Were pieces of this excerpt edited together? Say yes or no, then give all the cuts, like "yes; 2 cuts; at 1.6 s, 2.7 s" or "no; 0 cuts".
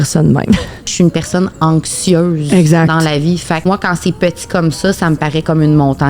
yes; 2 cuts; at 0.9 s, 3.6 s